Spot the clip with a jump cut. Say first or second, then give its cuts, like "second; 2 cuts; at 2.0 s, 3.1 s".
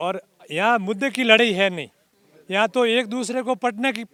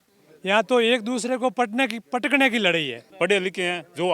second; 1 cut; at 3.0 s